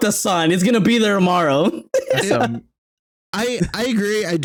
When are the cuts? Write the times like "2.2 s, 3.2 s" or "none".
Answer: none